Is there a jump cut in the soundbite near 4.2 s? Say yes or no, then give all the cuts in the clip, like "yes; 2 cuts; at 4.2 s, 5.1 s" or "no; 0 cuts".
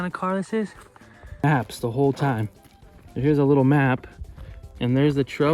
no; 1 cut; at 1.4 s